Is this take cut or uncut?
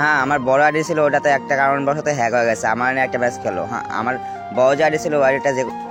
uncut